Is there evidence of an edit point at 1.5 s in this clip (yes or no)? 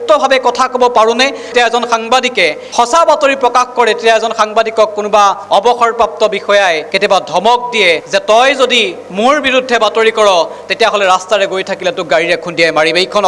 yes